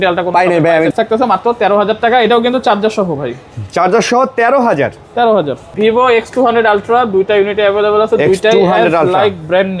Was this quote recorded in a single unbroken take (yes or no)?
no